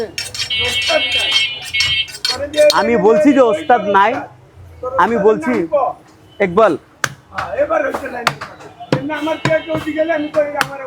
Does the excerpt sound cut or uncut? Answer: uncut